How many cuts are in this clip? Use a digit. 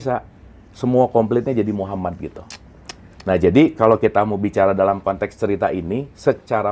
0